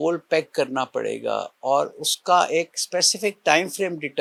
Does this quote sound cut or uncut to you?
uncut